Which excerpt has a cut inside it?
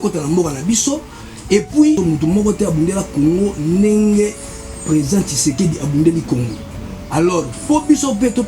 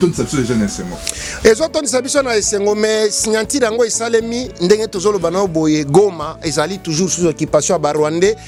first; 1 cut; at 2.0 s

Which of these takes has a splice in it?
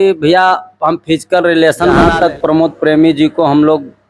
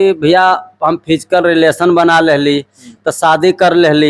first; 1 cut; at 2.1 s

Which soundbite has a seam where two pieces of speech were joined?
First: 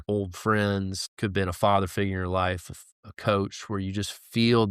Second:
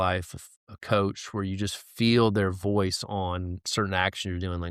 first; 1 cut; at 1.0 s

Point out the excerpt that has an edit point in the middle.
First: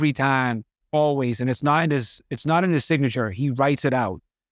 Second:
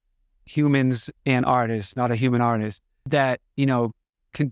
second; 1 cut; at 3.1 s

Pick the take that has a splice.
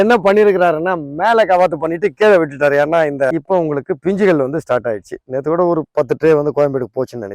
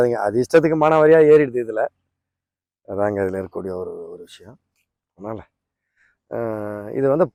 first; 1 cut; at 3.3 s

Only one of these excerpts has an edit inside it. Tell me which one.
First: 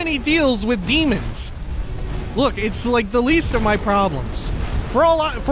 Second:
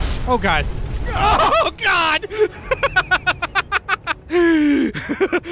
second; 1 cut; at 1.1 s

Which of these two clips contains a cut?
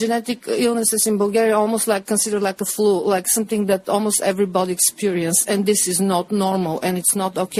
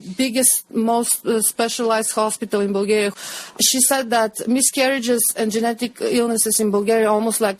second; 1 cut; at 3.2 s

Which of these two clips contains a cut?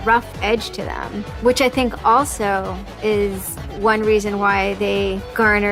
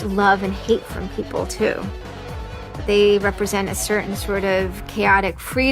second; 1 cut; at 4.8 s

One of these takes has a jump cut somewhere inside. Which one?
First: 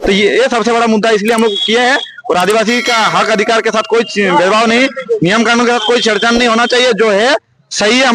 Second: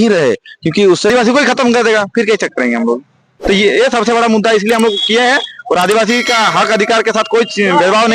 second; 1 cut; at 1.1 s

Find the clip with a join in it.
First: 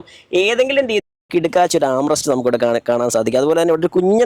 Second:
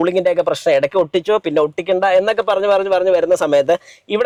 first; 1 cut; at 1.0 s

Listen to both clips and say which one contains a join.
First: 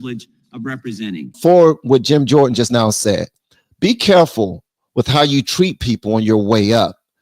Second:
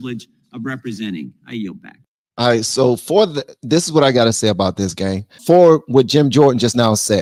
first; 1 cut; at 1.3 s

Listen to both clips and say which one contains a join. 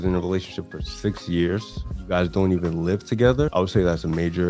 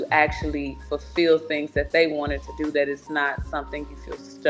first; 2 cuts; at 1.7 s, 3.5 s

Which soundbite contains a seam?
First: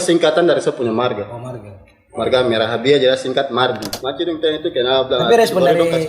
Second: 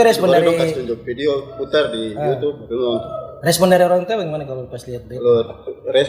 first; 1 cut; at 4.0 s

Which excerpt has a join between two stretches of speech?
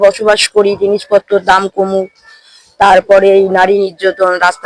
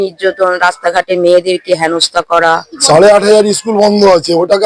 second; 1 cut; at 2.7 s

